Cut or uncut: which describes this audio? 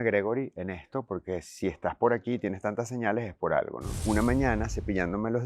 cut